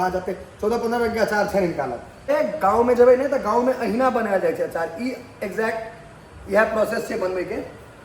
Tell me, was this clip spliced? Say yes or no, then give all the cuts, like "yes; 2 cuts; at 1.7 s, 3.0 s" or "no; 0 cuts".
yes; 1 cut; at 2.1 s